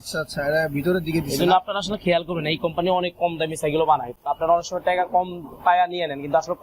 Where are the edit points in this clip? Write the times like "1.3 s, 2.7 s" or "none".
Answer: none